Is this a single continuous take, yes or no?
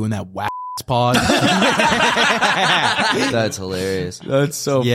no